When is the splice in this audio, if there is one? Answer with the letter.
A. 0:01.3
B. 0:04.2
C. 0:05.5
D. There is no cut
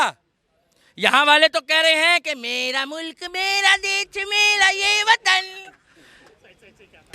D